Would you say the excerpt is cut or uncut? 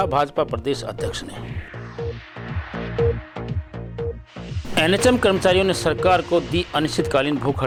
uncut